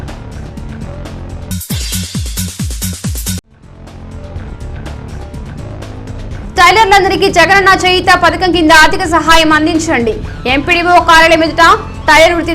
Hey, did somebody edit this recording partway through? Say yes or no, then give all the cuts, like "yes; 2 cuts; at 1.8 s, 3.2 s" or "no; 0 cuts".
no; 0 cuts